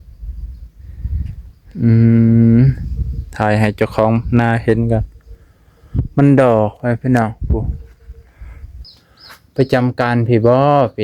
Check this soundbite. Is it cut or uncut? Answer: cut